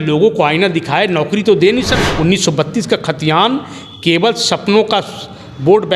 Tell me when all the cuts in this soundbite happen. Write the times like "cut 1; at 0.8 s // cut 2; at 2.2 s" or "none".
cut 1; at 1.9 s